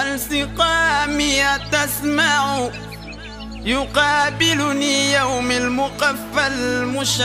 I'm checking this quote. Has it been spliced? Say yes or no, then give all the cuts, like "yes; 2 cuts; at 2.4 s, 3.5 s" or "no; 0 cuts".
no; 0 cuts